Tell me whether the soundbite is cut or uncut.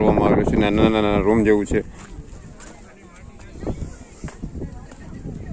uncut